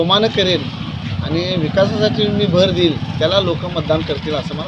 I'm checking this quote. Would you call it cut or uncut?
uncut